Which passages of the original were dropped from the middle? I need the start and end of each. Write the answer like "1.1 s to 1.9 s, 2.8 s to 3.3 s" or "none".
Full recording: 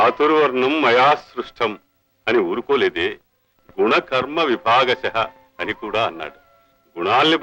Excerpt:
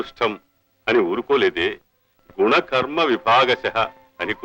none